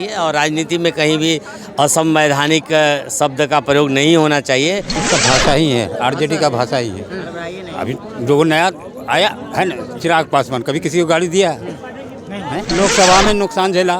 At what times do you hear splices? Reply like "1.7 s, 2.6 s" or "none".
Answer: 4.9 s, 12.7 s